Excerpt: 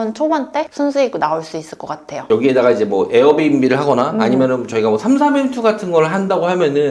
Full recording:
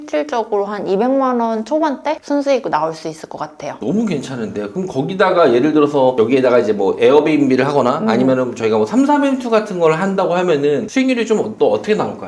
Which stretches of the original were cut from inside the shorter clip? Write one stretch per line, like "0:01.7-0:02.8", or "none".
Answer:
0:03.8-0:06.1

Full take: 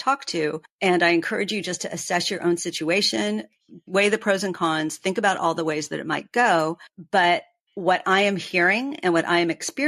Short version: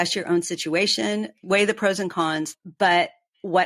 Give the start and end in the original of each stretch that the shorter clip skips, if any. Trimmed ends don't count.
0:03.5-0:03.8
0:05.0-0:06.8

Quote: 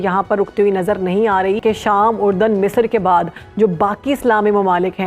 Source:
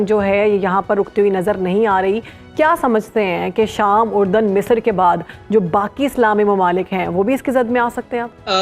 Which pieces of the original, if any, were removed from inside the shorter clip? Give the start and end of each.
0:02.2-0:03.5

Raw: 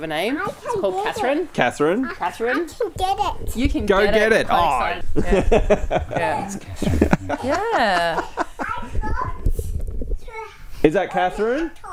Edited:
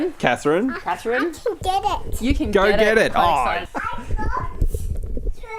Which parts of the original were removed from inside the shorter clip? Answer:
0:05.0-0:08.5

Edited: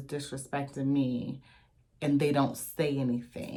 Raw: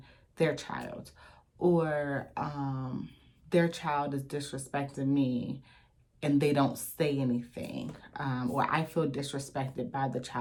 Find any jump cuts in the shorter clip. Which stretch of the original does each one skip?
none

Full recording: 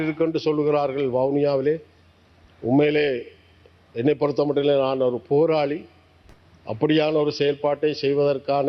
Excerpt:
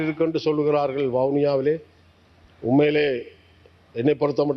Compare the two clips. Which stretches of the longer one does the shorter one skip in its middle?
none

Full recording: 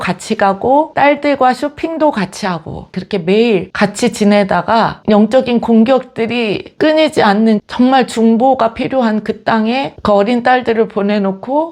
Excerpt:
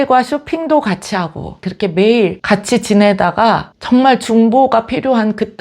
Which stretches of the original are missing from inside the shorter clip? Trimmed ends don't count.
0:05.0-0:07.6

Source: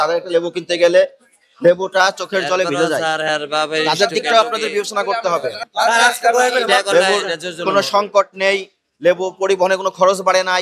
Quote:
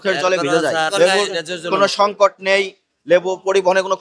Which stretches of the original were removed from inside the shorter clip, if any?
0:03.2-0:06.8

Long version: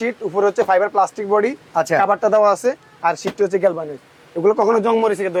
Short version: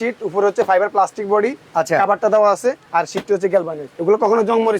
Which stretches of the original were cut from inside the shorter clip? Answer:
0:02.8-0:02.9
0:03.9-0:04.2

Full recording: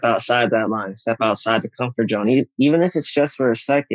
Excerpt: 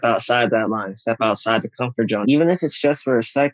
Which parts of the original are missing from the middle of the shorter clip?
0:02.2-0:02.5

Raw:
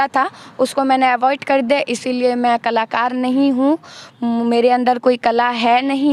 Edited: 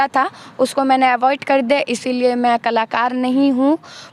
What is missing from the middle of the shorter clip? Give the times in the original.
none

